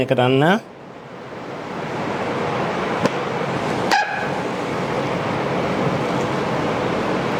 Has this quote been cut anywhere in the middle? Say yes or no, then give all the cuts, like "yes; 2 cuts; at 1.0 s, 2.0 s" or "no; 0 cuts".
no; 0 cuts